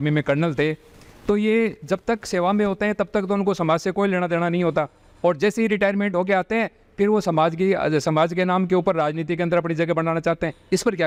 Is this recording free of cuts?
yes; 0 cuts

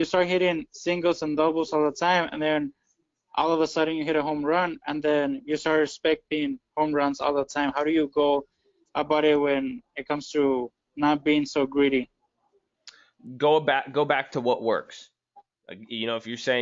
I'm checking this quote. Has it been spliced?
no; 0 cuts

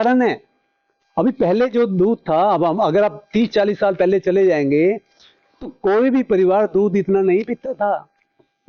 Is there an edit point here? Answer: no; 0 cuts

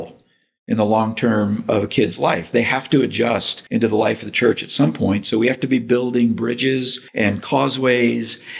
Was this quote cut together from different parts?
yes; 2 cuts; at 3.5 s, 7.0 s

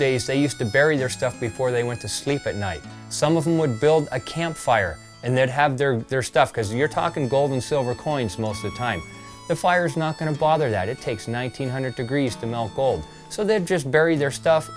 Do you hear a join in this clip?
no; 0 cuts

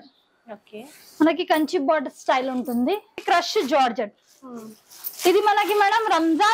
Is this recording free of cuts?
no; 1 cut; at 3.2 s

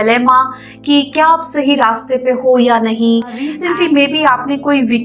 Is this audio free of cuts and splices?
no; 1 cut; at 3.6 s

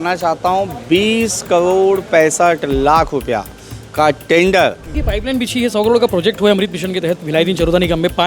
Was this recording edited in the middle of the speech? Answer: yes; 1 cut; at 5.0 s

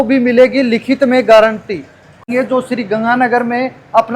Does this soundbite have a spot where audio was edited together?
yes; 1 cut; at 2.2 s

